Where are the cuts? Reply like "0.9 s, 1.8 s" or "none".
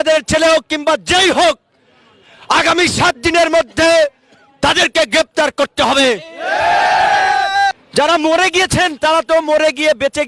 7.8 s